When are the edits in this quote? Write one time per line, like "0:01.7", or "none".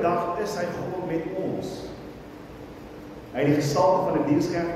0:02.8